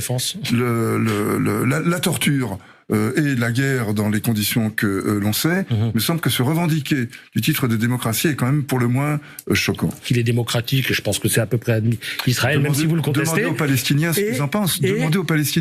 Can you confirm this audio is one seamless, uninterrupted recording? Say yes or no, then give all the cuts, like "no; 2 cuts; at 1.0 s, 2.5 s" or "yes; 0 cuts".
no; 1 cut; at 10.0 s